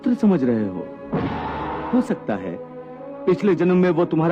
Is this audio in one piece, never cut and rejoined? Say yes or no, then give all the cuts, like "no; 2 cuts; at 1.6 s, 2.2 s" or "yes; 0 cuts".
no; 1 cut; at 1.8 s